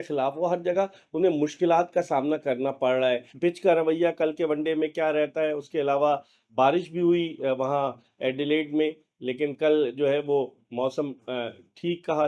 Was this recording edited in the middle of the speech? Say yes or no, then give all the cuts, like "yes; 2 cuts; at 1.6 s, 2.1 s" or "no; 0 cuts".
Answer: yes; 1 cut; at 3.3 s